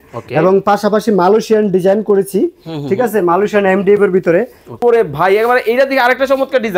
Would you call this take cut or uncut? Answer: cut